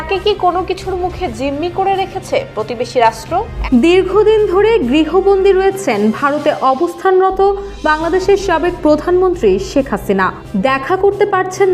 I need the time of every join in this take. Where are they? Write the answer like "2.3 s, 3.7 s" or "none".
3.5 s